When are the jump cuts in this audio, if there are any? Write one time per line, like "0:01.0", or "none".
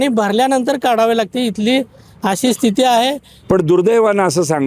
0:03.3